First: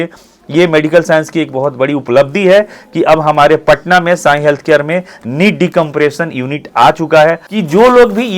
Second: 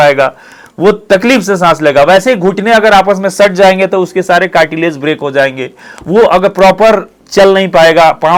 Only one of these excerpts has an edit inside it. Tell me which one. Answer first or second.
first